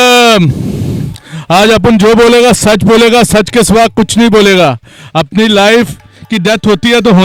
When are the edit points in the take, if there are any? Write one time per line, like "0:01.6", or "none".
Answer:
none